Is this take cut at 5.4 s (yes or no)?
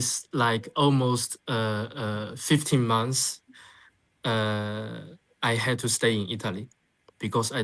no